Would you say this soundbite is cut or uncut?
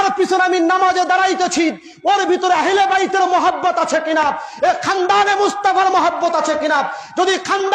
uncut